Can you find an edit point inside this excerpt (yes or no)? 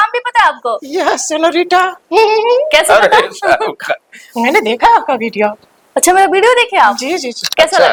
no